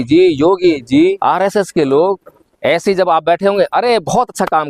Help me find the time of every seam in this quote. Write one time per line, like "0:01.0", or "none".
0:01.2